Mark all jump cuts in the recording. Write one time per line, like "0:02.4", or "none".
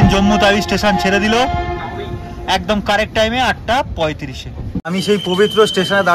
0:04.9